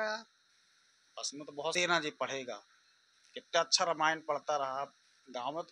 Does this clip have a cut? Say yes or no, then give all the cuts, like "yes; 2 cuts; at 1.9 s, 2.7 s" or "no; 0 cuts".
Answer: yes; 1 cut; at 1.7 s